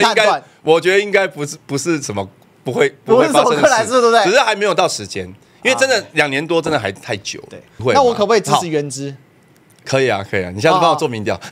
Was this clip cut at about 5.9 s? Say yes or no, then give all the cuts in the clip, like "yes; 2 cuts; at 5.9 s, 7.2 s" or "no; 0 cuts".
no; 1 cut; at 7.7 s